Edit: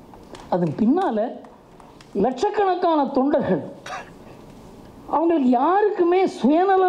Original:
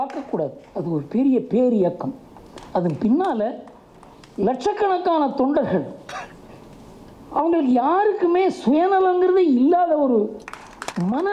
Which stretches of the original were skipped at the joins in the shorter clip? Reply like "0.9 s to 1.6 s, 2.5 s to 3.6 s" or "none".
none